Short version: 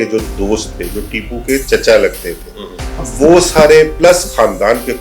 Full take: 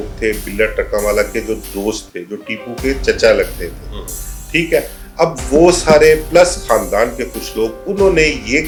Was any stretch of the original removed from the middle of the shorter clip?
yes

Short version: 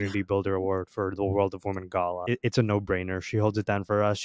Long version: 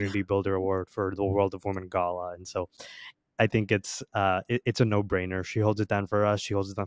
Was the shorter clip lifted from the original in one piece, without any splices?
no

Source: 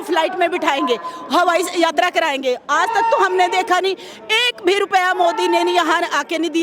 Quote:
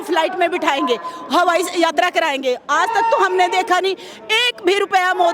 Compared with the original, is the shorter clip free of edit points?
yes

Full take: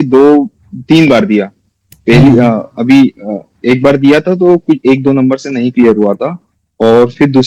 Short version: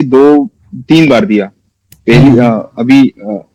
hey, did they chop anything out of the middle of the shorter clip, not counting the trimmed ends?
no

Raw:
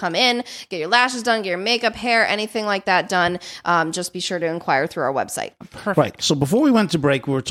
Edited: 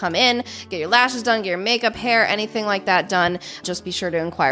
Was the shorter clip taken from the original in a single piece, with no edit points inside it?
no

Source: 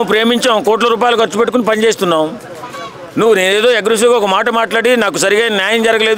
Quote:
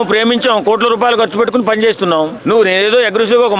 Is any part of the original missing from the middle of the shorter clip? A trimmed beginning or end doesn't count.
yes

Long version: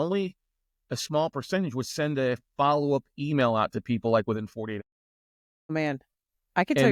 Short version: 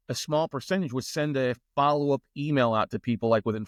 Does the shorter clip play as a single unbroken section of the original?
yes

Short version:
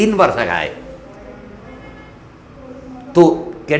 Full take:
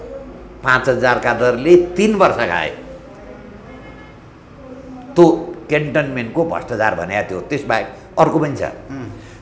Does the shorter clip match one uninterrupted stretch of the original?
yes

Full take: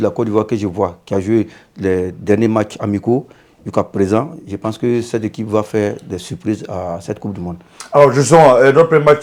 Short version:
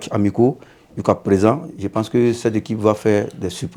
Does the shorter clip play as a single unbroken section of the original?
yes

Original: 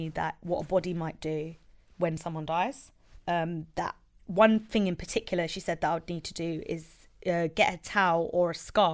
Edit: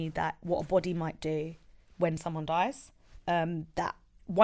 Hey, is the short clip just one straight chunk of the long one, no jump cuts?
yes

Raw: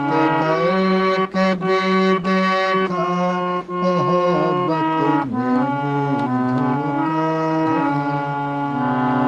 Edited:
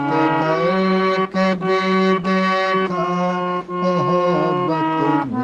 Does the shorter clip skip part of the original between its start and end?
no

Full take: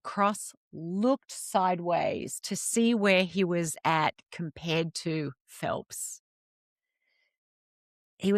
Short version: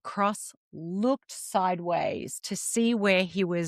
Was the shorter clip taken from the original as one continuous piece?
yes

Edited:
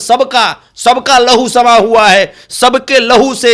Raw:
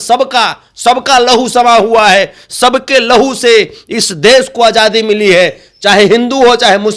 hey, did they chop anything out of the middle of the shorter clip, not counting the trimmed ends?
no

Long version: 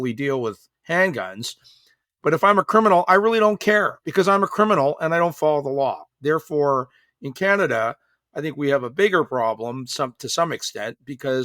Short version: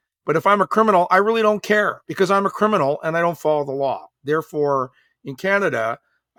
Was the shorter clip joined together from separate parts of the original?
no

